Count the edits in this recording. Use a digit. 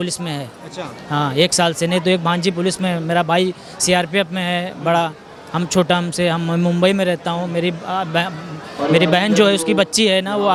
0